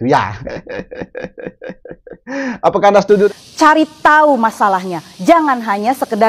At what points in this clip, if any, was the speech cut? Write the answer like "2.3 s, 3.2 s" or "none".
3.3 s